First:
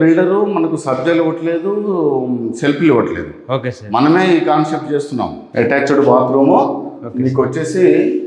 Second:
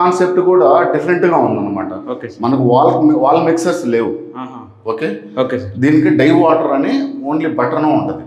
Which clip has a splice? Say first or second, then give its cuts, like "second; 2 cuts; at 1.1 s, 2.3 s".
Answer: first; 1 cut; at 5.4 s